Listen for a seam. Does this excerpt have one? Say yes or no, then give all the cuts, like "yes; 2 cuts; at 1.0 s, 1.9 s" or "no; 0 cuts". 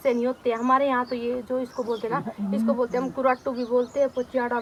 no; 0 cuts